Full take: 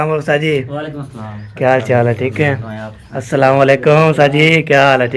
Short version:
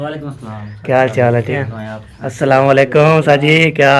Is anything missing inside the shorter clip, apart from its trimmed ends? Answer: yes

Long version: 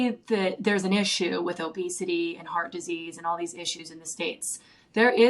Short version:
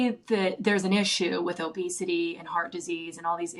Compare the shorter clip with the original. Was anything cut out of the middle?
no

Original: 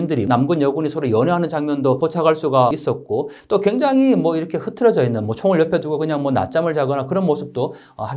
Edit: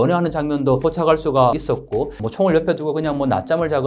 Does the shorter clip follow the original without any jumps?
no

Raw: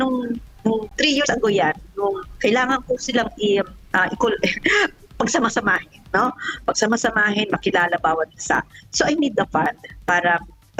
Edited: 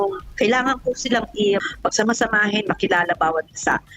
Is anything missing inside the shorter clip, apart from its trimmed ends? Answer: yes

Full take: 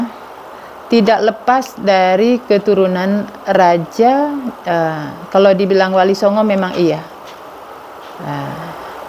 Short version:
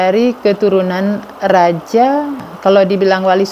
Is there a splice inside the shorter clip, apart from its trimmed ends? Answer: yes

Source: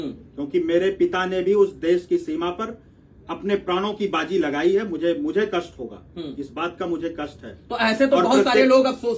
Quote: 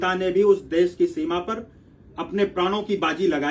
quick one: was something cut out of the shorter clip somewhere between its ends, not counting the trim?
no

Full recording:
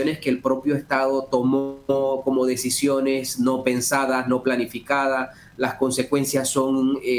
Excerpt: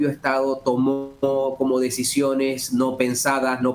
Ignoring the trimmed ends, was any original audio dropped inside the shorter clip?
no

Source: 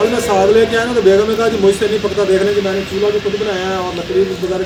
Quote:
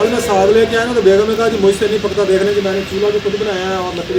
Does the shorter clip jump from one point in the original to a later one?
no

